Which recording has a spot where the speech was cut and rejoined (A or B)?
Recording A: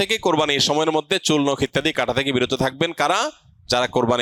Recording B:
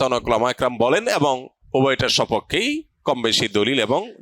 B